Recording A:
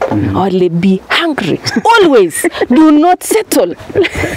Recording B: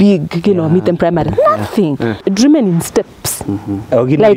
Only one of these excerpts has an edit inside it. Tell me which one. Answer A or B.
B